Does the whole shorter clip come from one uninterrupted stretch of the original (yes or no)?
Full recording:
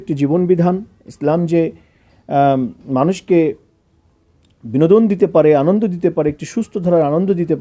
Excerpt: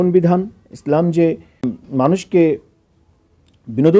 no